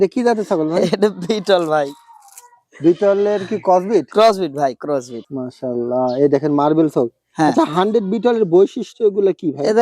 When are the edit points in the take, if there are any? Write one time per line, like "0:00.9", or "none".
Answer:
0:05.2